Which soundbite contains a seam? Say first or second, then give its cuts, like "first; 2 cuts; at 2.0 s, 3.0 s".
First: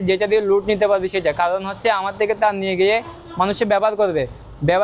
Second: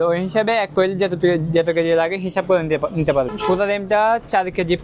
second; 1 cut; at 3.3 s